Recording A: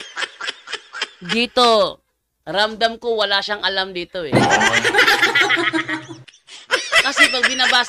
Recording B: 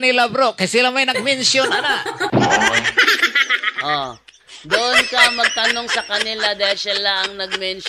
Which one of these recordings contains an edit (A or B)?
A